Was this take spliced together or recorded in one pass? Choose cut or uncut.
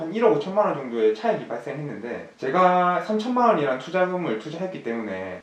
uncut